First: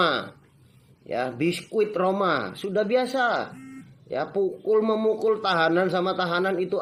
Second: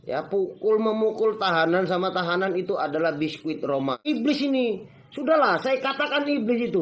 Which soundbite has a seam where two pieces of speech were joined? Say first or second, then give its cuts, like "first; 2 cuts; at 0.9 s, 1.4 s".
second; 1 cut; at 4.0 s